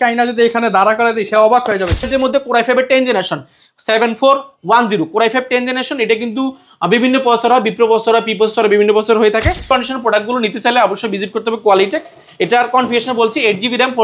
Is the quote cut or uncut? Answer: cut